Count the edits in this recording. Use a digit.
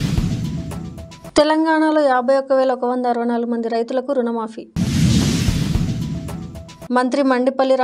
0